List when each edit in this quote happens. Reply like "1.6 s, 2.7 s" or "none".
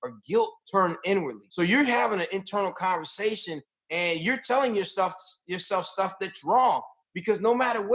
1.4 s